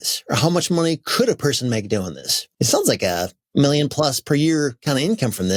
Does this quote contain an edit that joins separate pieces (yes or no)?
no